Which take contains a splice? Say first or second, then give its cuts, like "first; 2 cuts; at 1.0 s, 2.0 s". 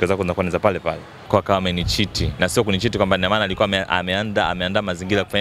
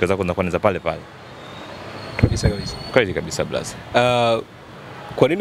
first; 1 cut; at 1.2 s